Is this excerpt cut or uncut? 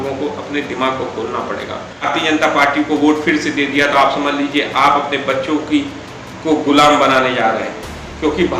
cut